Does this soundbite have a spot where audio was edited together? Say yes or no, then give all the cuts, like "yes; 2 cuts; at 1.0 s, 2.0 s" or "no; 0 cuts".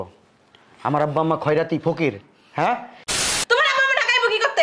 yes; 1 cut; at 3.1 s